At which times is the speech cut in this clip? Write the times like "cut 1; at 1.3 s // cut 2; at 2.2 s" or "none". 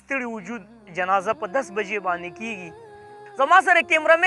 cut 1; at 3.3 s